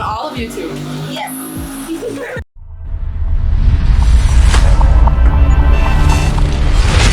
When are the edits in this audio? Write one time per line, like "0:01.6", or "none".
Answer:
none